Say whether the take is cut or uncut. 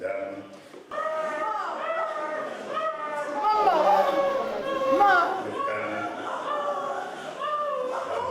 uncut